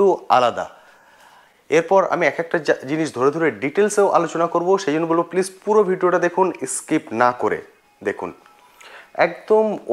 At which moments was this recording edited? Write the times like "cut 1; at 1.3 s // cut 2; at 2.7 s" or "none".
none